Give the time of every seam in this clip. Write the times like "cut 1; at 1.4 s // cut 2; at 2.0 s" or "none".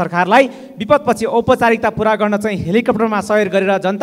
none